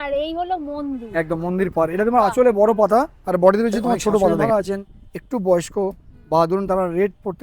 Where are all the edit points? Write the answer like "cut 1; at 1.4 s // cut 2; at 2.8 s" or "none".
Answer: cut 1; at 4.4 s